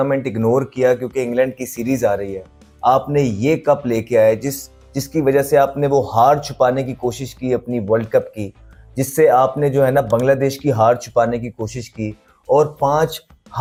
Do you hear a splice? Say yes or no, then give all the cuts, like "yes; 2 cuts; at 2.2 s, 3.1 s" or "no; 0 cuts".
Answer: no; 0 cuts